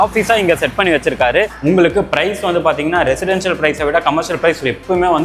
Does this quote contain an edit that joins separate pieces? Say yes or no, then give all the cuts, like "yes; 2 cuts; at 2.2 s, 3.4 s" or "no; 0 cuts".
yes; 1 cut; at 1.5 s